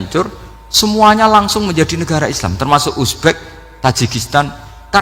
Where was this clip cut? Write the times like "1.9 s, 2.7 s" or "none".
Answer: none